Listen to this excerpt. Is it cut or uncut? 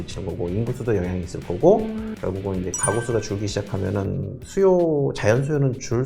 cut